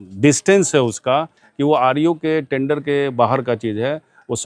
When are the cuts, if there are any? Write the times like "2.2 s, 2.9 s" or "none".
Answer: none